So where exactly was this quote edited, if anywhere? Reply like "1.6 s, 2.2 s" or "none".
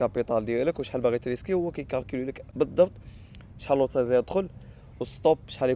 2.4 s